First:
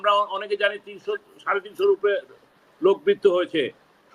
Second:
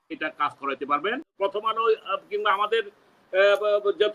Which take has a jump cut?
second; 1 cut; at 1.4 s

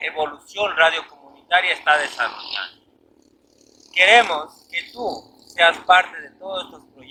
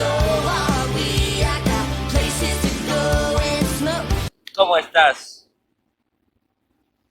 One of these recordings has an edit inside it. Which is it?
second; 1 cut; at 4.7 s

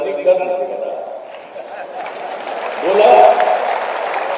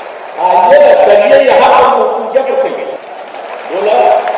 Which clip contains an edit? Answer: second; 1 cut; at 3.1 s

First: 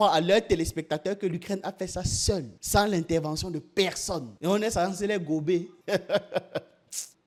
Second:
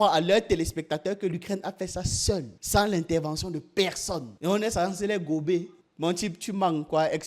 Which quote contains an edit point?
second; 1 cut; at 5.7 s

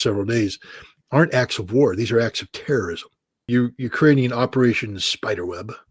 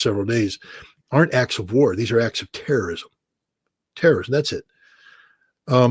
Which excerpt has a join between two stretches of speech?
first; 1 cut; at 3.3 s

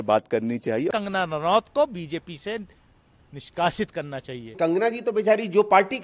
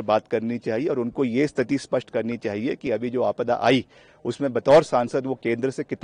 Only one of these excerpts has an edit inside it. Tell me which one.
first; 2 cuts; at 0.9 s, 4.5 s

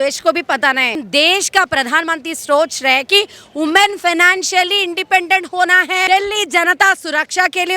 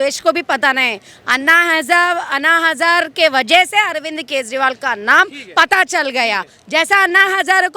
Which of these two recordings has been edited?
first; 2 cuts; at 1.0 s, 6.1 s

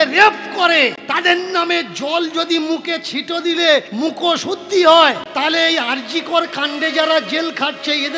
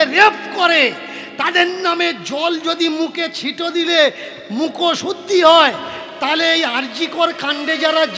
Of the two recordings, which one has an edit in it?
first; 3 cuts; at 1.0 s, 3.9 s, 5.2 s

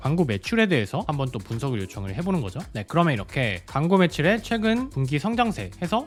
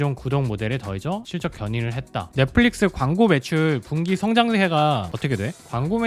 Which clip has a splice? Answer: second; 1 cut; at 2.2 s

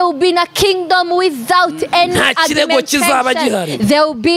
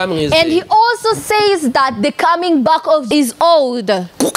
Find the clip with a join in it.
second; 1 cut; at 3.0 s

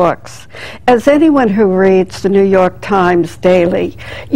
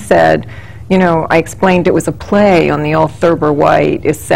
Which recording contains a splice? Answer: second; 1 cut; at 1.6 s

